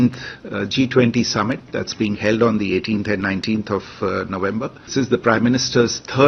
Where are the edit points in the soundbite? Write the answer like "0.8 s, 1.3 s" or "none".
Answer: 4.9 s